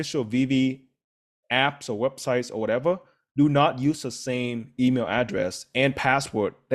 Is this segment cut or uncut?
uncut